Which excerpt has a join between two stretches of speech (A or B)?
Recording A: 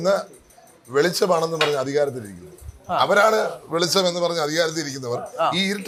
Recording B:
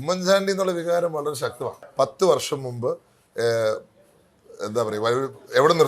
B